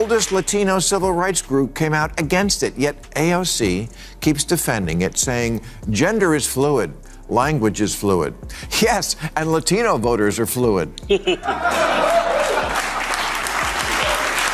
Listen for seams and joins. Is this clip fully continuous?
yes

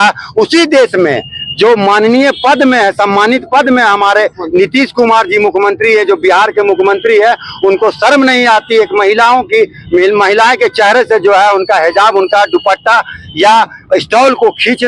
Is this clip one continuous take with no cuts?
yes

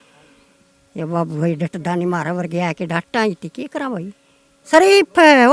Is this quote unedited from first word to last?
no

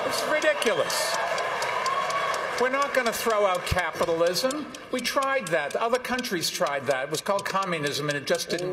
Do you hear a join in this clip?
no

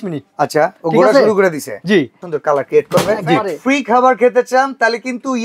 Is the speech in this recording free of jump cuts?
no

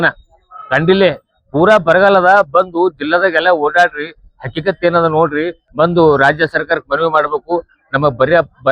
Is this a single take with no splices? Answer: no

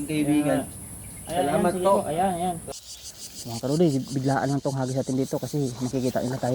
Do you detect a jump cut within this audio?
yes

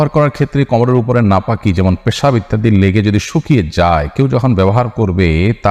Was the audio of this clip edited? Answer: no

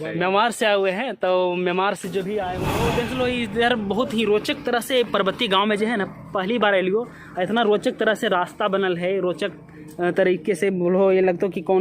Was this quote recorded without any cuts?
no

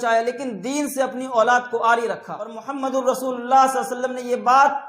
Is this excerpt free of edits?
no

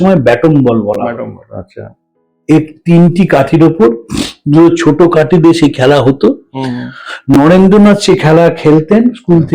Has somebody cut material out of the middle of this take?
no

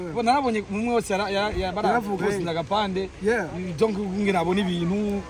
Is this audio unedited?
yes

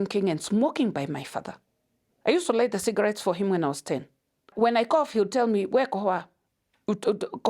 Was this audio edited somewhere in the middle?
yes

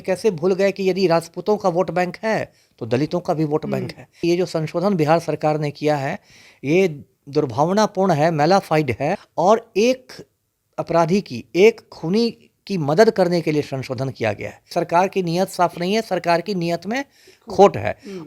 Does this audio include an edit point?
yes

